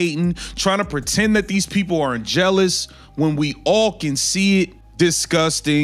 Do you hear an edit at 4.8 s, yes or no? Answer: yes